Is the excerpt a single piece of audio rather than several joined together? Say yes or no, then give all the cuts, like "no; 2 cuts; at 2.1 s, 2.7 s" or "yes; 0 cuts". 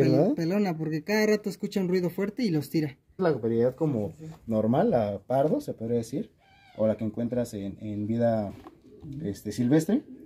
no; 1 cut; at 3.2 s